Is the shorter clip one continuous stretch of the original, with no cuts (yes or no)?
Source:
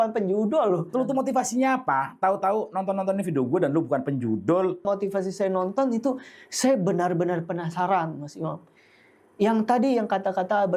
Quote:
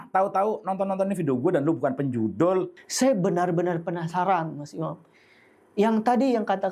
no